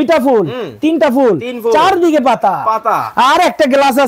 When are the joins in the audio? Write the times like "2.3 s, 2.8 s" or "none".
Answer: none